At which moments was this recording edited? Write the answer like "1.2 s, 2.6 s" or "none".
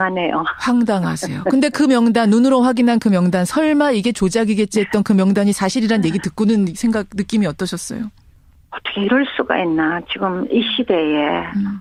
none

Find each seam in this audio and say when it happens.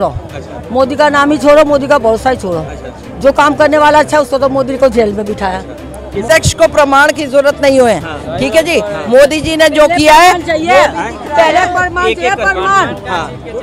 6.2 s

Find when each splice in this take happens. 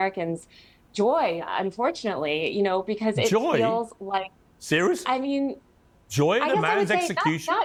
none

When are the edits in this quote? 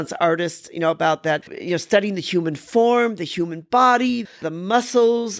1.5 s

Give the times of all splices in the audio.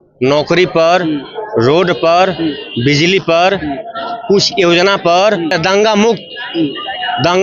5.5 s

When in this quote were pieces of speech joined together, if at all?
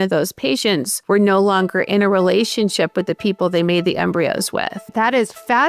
0.9 s, 4.9 s

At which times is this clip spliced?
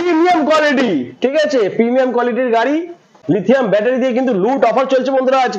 3.1 s

